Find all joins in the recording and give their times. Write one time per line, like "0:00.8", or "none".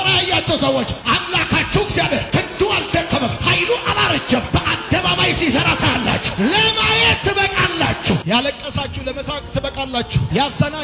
none